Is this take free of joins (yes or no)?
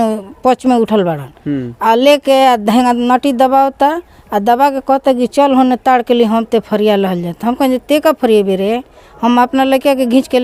yes